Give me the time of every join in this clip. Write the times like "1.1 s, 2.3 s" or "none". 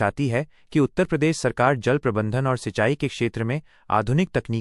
none